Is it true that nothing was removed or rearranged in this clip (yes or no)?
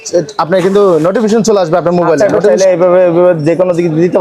no